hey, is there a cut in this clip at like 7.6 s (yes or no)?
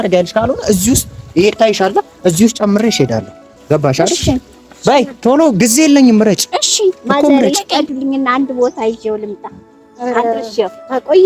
yes